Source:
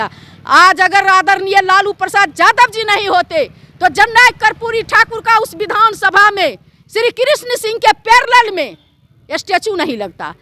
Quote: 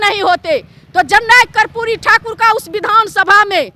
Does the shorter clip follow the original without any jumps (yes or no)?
yes